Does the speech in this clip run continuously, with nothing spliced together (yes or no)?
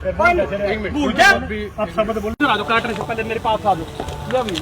no